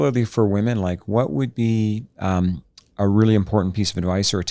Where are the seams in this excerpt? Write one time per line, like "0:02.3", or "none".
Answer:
none